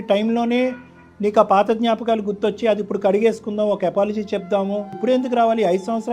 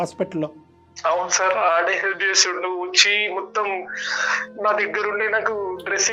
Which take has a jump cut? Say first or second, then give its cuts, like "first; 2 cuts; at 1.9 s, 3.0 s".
first; 1 cut; at 5.0 s